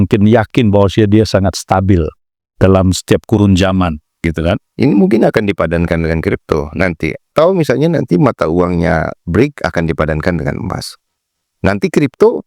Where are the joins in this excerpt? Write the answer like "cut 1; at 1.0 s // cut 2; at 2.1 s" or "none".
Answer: cut 1; at 7.3 s